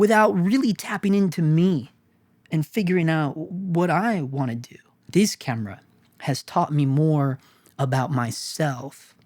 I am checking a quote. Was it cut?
yes; 2 cuts; at 3.5 s, 4.9 s

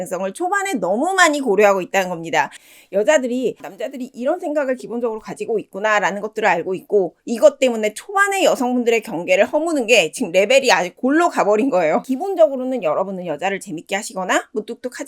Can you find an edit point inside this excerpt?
yes; 3 cuts; at 2.6 s, 3.7 s, 12.1 s

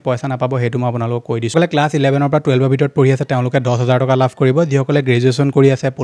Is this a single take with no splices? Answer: no; 1 cut; at 1.5 s

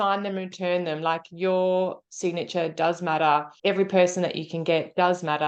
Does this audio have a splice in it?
no; 0 cuts

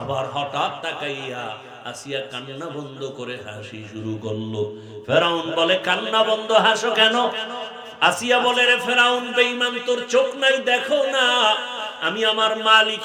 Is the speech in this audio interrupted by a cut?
no; 0 cuts

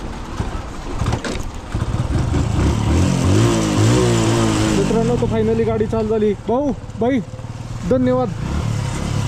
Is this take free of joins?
yes; 0 cuts

